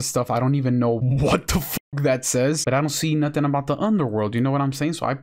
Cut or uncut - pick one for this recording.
cut